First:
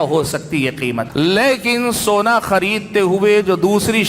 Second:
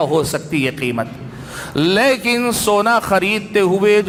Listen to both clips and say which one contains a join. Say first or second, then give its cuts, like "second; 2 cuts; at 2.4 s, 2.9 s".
first; 1 cut; at 1.1 s